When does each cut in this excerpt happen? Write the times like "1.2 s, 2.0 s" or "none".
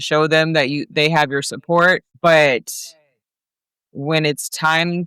2.1 s